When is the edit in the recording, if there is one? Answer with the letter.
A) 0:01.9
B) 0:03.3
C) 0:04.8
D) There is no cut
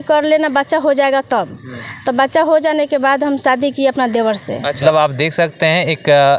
C